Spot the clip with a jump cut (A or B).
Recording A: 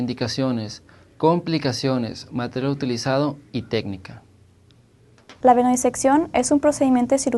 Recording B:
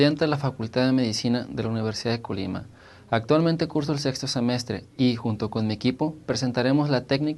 A